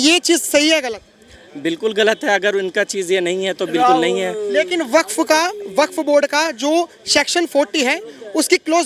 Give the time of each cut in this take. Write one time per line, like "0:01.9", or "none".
none